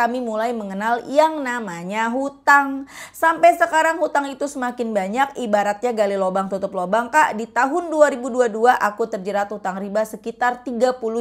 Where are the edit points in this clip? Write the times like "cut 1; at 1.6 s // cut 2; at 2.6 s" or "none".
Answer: none